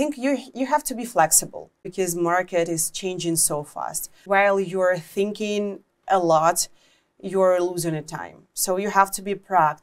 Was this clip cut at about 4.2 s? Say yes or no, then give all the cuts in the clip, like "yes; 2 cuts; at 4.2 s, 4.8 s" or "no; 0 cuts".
yes; 2 cuts; at 1.8 s, 4.2 s